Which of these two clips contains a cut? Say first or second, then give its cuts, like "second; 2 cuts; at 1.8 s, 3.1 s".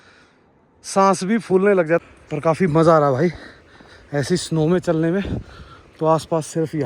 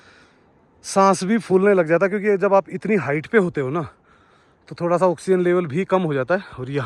first; 1 cut; at 2.0 s